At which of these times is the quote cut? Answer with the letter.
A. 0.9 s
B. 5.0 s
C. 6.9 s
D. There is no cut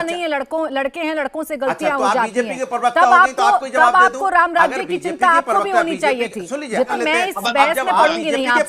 C